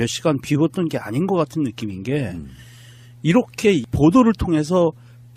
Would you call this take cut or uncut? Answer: uncut